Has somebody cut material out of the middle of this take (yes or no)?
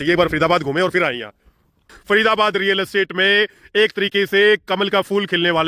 yes